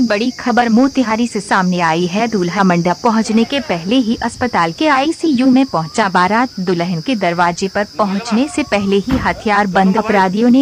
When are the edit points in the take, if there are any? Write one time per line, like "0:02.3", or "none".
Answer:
none